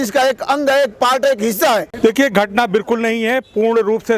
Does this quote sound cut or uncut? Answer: cut